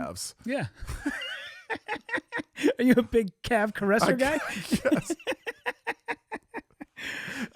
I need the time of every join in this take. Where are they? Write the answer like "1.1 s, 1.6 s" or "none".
none